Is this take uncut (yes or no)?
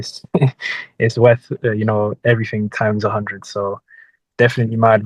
yes